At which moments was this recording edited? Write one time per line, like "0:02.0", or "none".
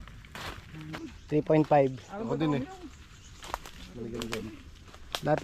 0:01.1